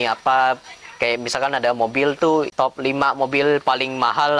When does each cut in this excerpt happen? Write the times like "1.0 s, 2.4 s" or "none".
2.5 s

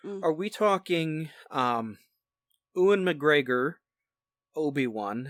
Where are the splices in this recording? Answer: none

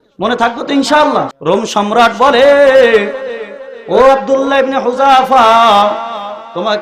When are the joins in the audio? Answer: 1.3 s

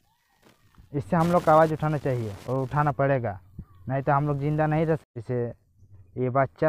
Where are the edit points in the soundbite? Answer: 5.0 s

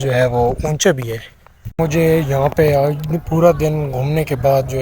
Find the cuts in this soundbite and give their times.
1.8 s

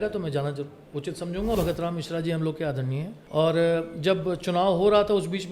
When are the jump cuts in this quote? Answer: 1.6 s, 3.1 s

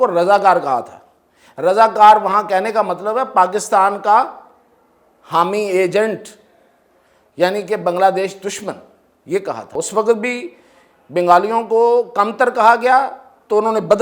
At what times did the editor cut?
9.7 s

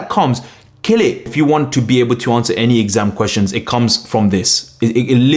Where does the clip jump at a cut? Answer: 1.3 s

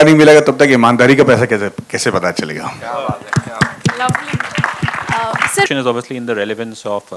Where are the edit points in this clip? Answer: 5.7 s

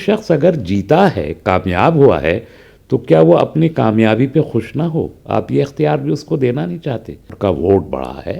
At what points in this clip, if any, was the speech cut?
7.3 s

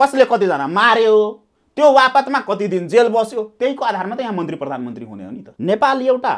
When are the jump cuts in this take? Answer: 5.4 s

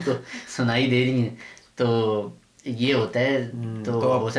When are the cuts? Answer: none

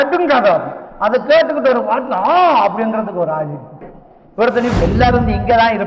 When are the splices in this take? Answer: 4.7 s

